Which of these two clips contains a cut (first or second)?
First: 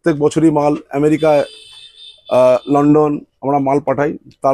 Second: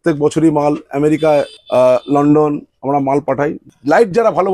second